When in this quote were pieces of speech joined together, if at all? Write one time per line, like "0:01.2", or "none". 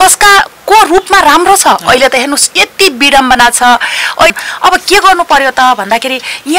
0:04.3